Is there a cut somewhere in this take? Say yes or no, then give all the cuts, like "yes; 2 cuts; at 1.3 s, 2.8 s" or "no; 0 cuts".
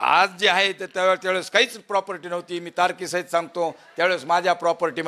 no; 0 cuts